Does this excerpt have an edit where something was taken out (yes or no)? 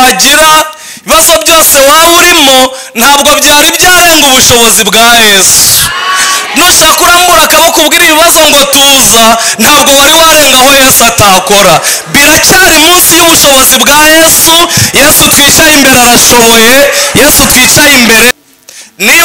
yes